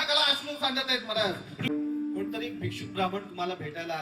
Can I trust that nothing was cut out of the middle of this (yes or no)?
no